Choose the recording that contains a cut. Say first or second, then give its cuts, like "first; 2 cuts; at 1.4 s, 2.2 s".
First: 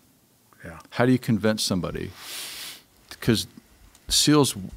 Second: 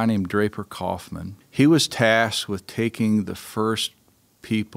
second; 1 cut; at 1.4 s